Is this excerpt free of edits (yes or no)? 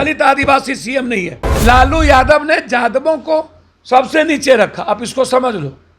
no